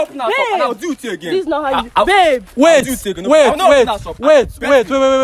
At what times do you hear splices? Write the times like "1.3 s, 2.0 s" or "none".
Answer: none